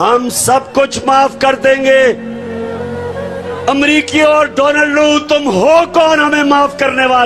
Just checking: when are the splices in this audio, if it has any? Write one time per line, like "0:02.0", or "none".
0:02.3
0:03.7